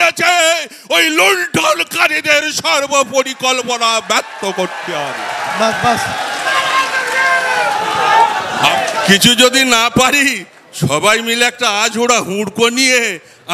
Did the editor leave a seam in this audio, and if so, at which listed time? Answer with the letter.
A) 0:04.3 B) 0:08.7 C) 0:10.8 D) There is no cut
B